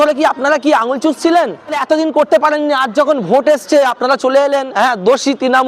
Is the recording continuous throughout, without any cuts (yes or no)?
no